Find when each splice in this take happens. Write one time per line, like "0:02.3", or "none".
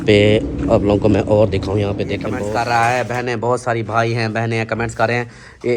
0:02.4